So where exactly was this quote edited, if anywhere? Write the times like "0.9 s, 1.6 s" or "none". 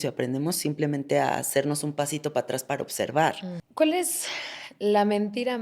3.5 s